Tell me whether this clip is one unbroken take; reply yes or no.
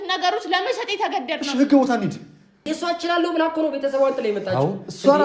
no